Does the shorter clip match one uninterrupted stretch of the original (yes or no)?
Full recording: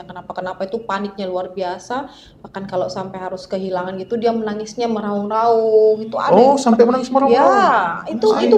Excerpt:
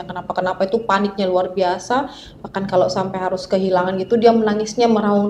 yes